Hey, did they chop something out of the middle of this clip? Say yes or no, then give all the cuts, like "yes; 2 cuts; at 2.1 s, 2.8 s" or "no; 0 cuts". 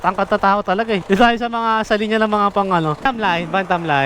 yes; 2 cuts; at 1.0 s, 3.0 s